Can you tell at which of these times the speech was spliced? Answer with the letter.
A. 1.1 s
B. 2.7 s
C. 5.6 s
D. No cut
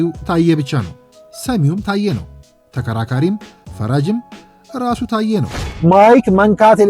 C